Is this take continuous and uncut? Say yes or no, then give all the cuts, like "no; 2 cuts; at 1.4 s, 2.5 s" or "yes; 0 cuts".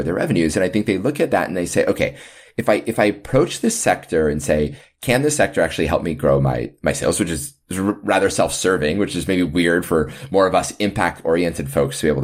yes; 0 cuts